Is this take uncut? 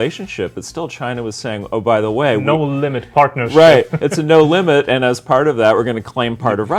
yes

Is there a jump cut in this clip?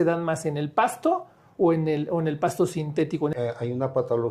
yes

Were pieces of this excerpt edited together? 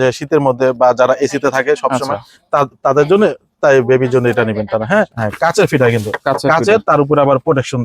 yes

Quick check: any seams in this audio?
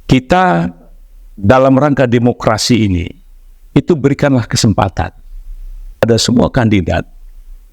yes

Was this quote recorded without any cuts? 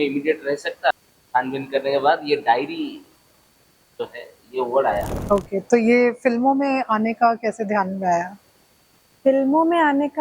no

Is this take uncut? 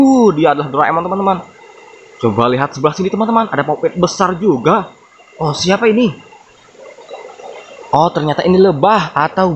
yes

